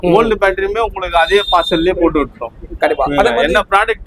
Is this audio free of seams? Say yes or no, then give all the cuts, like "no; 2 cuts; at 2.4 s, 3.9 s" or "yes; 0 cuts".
yes; 0 cuts